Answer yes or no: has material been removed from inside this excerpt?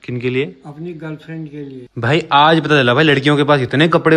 yes